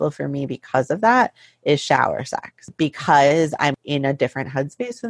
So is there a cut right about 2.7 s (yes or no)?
yes